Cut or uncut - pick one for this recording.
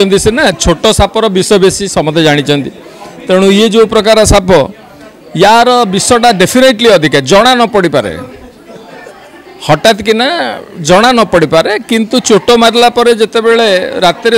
uncut